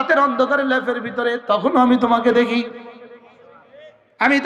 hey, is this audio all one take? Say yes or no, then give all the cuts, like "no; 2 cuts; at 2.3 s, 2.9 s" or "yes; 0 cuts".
yes; 0 cuts